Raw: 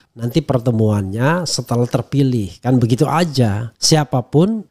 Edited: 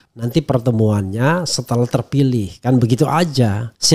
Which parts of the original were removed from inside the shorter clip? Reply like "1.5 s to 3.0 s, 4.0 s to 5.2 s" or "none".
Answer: none